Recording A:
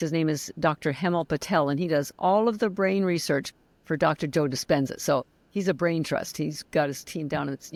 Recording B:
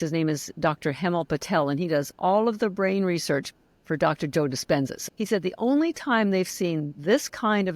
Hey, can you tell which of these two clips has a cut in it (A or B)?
B